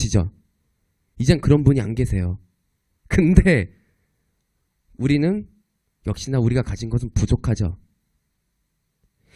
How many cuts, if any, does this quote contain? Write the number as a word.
zero